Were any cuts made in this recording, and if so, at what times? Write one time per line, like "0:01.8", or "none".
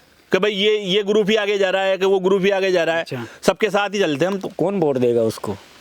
0:04.5